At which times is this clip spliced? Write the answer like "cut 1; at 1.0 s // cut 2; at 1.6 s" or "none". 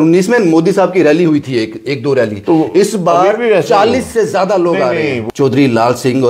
cut 1; at 5.2 s